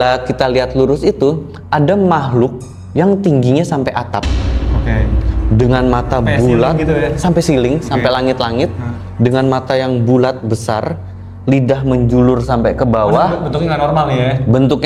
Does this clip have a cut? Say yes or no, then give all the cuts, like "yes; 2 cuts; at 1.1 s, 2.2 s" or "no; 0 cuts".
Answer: no; 0 cuts